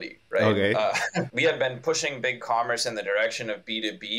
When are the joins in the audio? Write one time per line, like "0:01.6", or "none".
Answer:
0:01.3